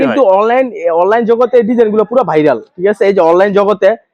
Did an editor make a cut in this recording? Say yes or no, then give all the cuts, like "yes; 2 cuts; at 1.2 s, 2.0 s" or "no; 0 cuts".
no; 0 cuts